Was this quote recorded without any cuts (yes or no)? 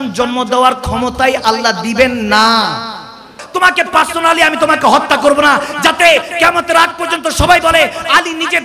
no